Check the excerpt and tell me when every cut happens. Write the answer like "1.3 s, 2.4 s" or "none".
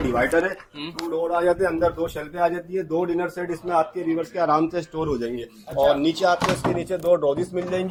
none